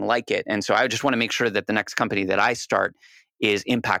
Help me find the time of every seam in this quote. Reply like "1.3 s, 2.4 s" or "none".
none